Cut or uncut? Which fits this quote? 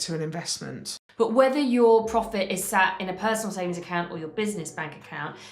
cut